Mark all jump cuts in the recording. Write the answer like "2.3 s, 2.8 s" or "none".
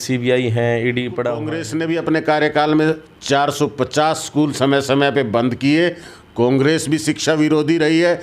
1.6 s